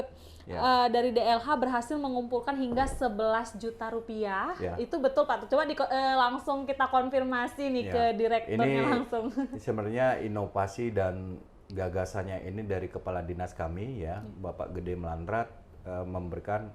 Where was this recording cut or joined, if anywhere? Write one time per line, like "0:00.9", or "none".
none